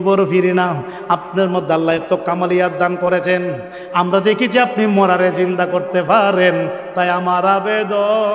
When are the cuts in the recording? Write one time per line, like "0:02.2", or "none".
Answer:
none